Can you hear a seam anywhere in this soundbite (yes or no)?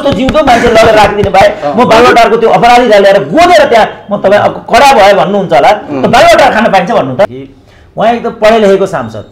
yes